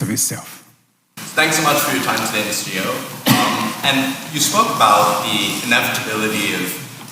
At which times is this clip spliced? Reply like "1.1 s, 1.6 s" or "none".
1.3 s